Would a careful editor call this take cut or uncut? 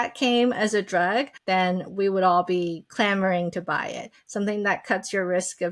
cut